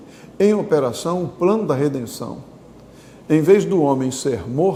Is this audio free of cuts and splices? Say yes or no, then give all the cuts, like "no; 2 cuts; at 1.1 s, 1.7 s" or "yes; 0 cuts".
yes; 0 cuts